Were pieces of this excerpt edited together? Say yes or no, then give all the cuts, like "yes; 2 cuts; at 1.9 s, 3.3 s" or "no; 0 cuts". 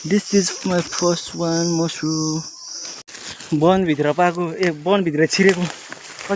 yes; 1 cut; at 3.0 s